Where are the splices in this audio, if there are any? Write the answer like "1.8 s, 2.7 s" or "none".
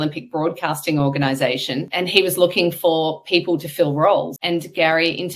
1.9 s, 4.4 s